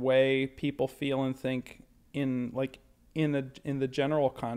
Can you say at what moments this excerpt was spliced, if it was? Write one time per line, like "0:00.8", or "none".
none